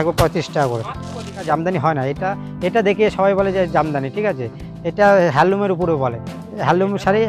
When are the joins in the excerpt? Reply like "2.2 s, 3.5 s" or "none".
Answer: 1.3 s